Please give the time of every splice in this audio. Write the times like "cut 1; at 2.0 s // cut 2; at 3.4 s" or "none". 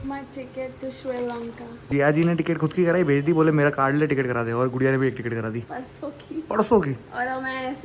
cut 1; at 1.9 s // cut 2; at 5.6 s